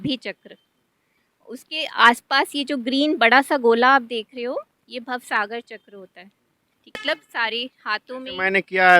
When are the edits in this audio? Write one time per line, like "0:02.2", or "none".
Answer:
0:07.0